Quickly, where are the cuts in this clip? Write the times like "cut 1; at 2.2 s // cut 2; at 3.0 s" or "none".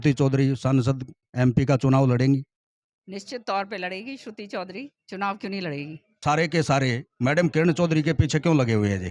cut 1; at 6.2 s

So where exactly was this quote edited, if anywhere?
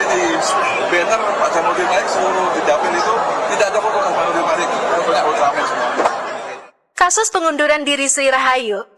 cut 1; at 6.4 s

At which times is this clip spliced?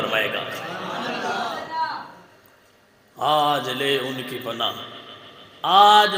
none

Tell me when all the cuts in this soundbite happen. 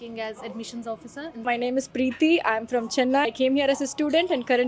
cut 1; at 1.4 s // cut 2; at 3.3 s

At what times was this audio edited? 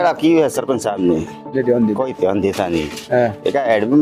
none

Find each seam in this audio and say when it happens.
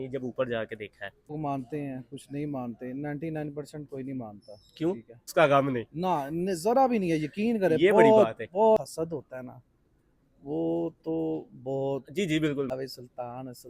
cut 1; at 1.3 s // cut 2; at 5.3 s // cut 3; at 8.8 s // cut 4; at 12.7 s

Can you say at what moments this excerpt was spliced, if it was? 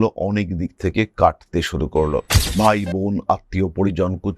cut 1; at 2.4 s

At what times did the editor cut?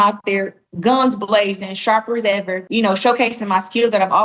cut 1; at 2.6 s

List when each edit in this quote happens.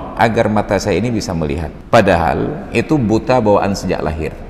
cut 1; at 1.7 s

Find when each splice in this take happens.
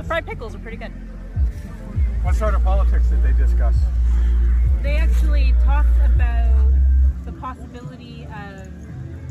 cut 1; at 3.9 s

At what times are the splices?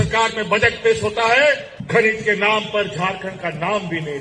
cut 1; at 1.7 s

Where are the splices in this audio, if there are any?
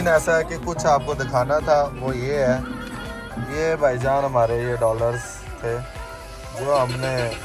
none

